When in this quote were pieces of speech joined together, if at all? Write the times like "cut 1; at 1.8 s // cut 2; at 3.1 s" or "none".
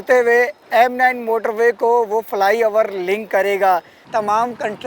cut 1; at 4.0 s